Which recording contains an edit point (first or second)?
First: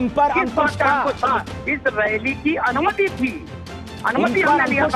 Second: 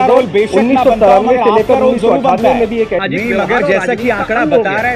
second